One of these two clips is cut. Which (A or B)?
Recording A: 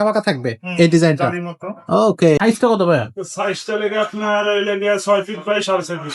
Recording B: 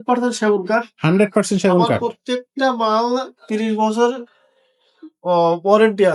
A